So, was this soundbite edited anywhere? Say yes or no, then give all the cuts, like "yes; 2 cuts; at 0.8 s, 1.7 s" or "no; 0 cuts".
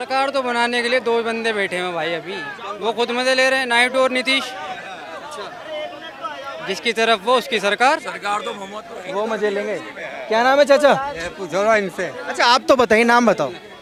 no; 0 cuts